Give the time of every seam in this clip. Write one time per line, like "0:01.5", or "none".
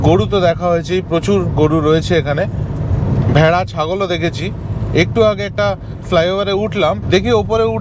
none